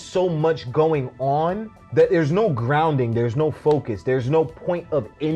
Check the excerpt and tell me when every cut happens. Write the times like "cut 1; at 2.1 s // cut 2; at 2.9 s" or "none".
cut 1; at 1.7 s